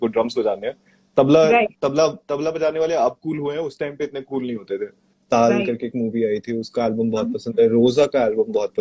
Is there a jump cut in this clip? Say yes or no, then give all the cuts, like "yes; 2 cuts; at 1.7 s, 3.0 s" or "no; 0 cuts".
yes; 1 cut; at 5.0 s